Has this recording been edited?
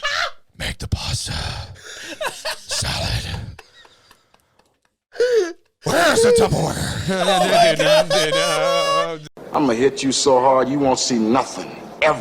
yes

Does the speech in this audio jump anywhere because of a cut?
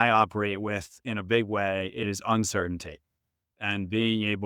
yes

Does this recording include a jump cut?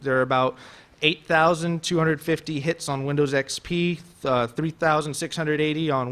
no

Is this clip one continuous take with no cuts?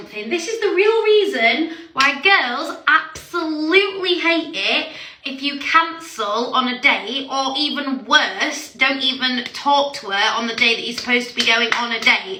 yes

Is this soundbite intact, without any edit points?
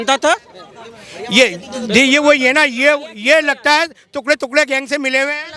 yes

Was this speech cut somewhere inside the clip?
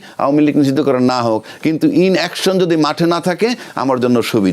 no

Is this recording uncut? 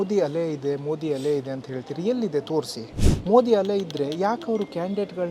yes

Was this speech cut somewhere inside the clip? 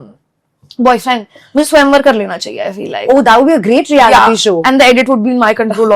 no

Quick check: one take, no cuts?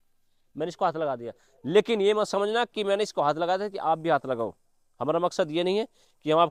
yes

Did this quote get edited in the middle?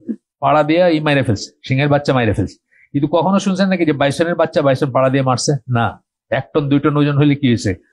no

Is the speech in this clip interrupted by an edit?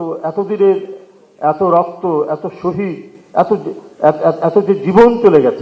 no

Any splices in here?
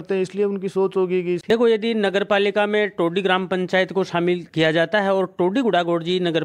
yes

